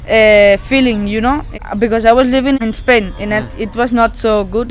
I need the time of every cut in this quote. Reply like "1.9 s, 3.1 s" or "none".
1.5 s, 2.6 s